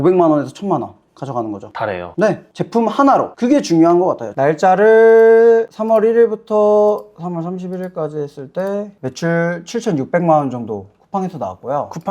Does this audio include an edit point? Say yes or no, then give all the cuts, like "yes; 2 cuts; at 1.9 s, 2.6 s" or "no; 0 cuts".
yes; 1 cut; at 4.3 s